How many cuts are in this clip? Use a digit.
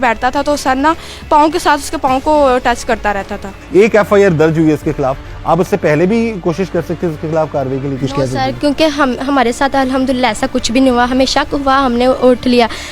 0